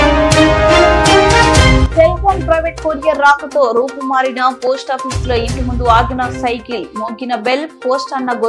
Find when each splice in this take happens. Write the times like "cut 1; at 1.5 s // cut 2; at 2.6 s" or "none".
cut 1; at 1.8 s